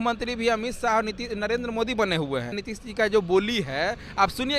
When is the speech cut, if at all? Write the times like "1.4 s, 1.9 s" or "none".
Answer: 2.6 s